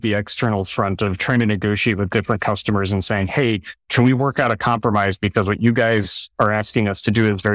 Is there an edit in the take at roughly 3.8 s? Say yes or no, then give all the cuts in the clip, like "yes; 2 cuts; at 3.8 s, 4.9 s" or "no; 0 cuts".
yes; 1 cut; at 3.8 s